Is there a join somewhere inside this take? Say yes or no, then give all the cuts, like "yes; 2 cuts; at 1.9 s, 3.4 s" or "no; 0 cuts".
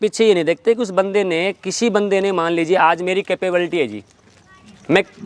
no; 0 cuts